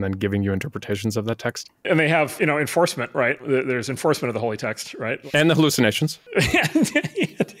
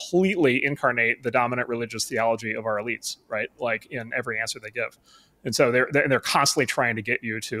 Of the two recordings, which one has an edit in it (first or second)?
first